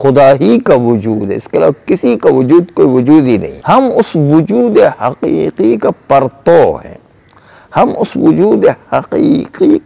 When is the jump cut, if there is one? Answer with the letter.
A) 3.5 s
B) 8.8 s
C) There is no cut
A